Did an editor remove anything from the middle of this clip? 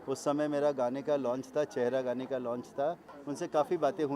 yes; 1 cut; at 3.1 s

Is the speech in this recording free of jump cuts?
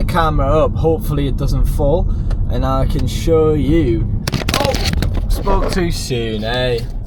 yes; 0 cuts

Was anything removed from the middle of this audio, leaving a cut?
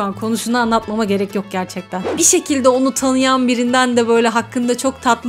yes; 1 cut; at 2.1 s

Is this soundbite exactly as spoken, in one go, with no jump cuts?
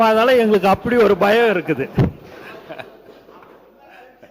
yes; 0 cuts

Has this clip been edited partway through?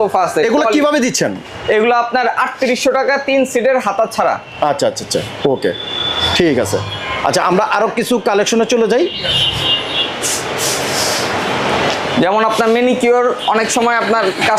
no; 0 cuts

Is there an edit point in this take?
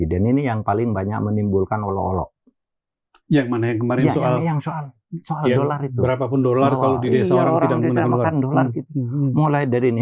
no; 0 cuts

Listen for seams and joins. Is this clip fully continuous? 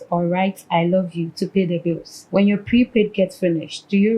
no; 1 cut; at 2.1 s

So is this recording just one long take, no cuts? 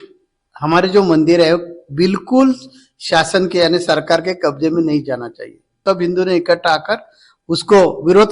no; 1 cut; at 5.8 s

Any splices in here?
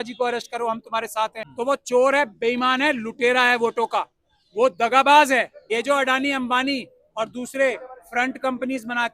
yes; 2 cuts; at 1.4 s, 5.6 s

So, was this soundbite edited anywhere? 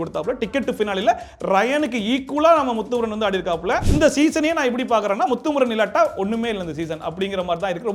yes; 1 cut; at 3.9 s

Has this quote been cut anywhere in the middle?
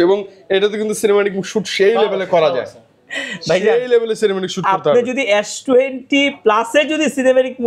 no; 0 cuts

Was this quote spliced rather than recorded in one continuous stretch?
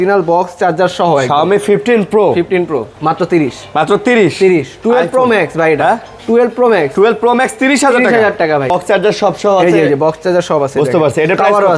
yes; 2 cuts; at 2.9 s, 8.7 s

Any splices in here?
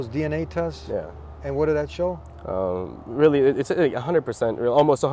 no; 0 cuts

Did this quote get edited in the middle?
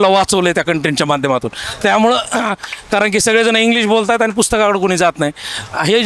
no; 0 cuts

